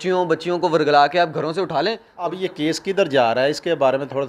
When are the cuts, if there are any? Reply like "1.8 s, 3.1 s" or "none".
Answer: 2.1 s